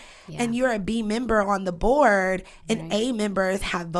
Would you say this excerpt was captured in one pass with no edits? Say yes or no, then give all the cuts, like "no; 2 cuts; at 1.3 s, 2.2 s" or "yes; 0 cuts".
yes; 0 cuts